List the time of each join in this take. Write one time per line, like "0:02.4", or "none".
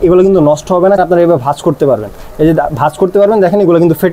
0:01.0